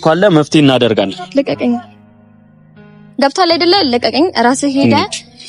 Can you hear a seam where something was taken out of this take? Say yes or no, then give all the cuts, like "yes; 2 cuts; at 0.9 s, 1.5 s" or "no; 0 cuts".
no; 0 cuts